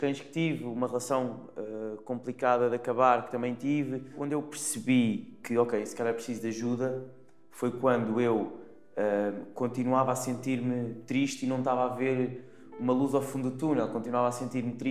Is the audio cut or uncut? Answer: cut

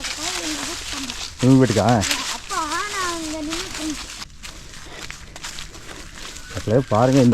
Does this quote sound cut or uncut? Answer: cut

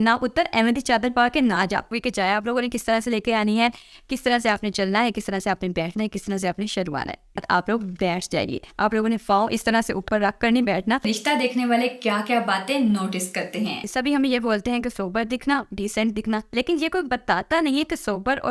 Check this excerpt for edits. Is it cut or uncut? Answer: cut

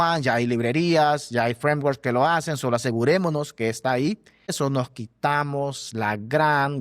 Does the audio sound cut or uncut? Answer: cut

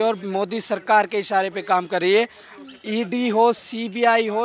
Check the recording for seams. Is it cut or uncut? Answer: uncut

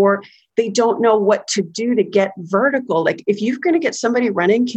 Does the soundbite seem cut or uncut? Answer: uncut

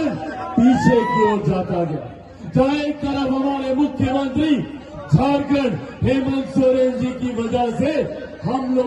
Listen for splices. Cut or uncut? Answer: uncut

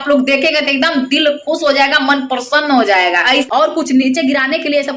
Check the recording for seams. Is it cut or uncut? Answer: cut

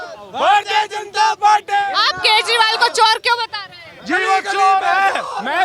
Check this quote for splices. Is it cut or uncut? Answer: uncut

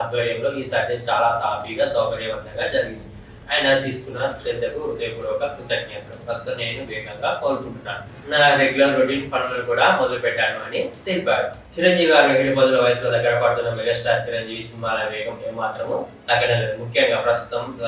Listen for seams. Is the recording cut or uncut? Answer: uncut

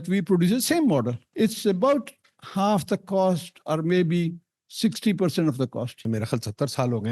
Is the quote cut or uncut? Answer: cut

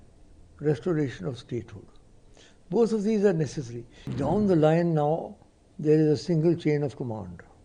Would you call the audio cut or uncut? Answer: cut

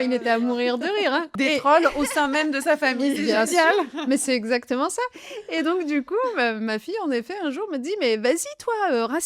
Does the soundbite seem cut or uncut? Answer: cut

